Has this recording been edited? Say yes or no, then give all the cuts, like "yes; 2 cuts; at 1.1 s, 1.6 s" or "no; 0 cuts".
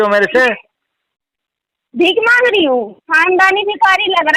yes; 1 cut; at 3.0 s